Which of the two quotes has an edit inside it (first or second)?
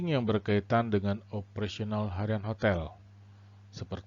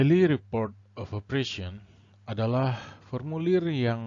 first